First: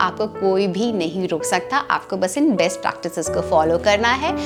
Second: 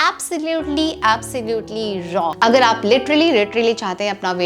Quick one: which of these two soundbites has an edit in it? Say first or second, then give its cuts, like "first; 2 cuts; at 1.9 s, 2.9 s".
second; 1 cut; at 2.3 s